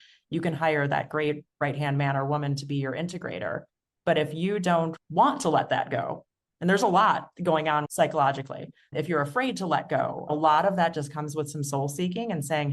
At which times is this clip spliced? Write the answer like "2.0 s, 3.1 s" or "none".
5.0 s, 7.9 s, 10.3 s

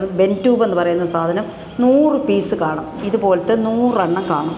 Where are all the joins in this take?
none

